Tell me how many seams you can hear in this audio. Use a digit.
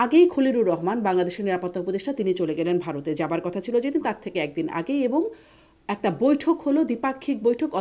0